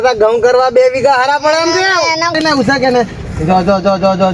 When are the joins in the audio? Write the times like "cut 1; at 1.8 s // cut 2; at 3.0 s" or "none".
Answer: cut 1; at 2.3 s